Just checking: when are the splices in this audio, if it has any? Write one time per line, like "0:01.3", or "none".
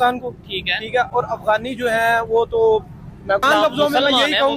0:03.4